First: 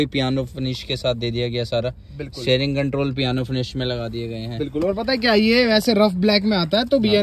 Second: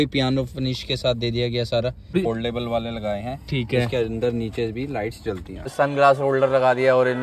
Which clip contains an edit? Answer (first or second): second